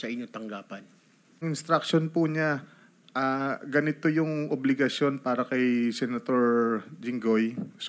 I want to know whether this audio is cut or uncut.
cut